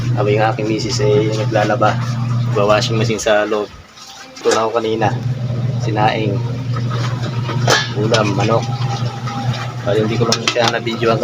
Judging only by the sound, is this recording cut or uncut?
cut